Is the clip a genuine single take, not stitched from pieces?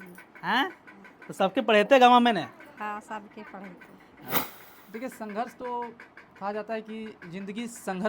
no; 1 cut; at 4.5 s

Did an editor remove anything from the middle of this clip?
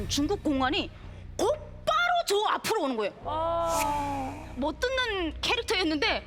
yes; 1 cut; at 4.5 s

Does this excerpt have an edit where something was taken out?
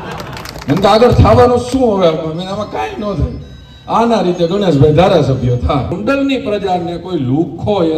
yes; 1 cut; at 6.0 s

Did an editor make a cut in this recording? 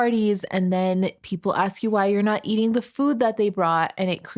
no; 0 cuts

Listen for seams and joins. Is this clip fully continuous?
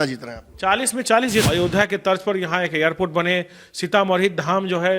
no; 1 cut; at 1.5 s

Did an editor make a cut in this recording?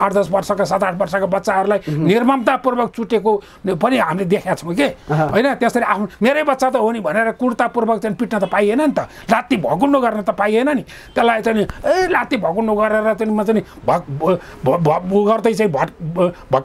no; 0 cuts

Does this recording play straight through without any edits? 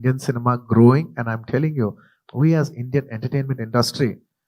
no; 1 cut; at 2.1 s

